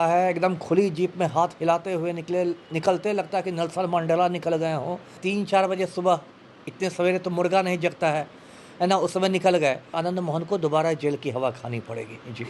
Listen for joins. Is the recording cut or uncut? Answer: cut